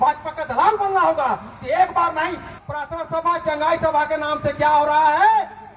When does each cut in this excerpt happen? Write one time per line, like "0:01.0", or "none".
0:02.5